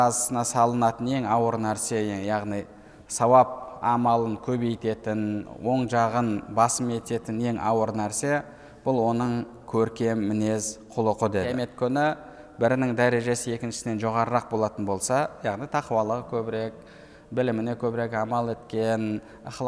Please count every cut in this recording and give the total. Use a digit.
1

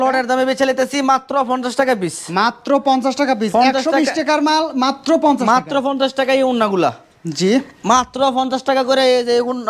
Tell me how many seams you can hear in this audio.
0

